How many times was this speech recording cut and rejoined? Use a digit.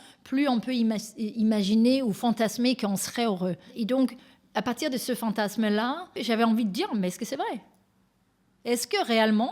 2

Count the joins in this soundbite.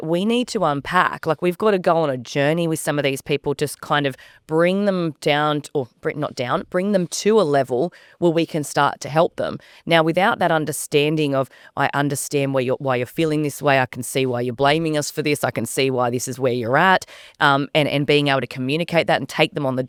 0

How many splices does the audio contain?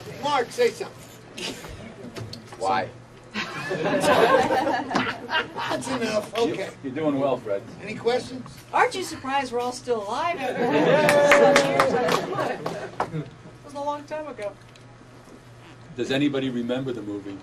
1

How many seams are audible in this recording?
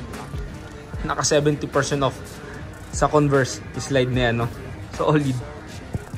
0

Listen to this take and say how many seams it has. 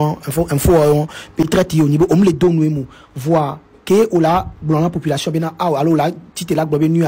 1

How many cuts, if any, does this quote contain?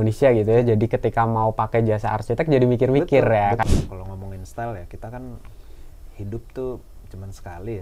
1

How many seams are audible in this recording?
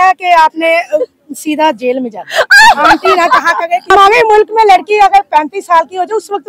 1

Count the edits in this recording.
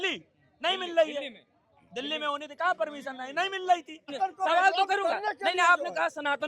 1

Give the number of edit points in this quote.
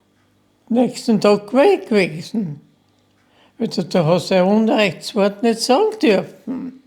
0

